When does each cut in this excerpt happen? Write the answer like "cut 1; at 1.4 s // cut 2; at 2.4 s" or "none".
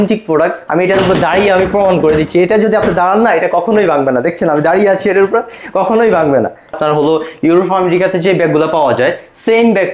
cut 1; at 6.7 s